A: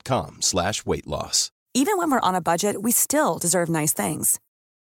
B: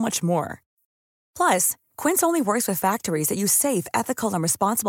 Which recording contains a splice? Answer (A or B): A